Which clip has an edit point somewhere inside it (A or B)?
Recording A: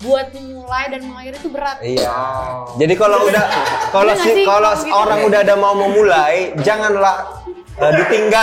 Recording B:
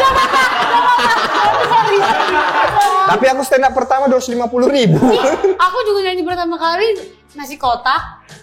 B